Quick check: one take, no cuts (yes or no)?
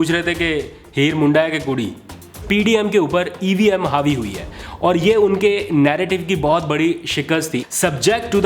no